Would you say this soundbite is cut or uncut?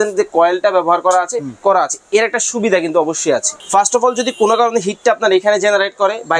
cut